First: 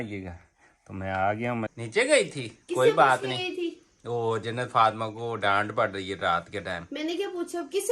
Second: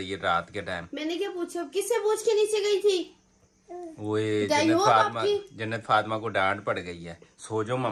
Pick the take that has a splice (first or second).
first